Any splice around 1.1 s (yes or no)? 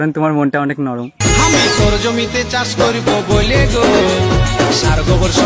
yes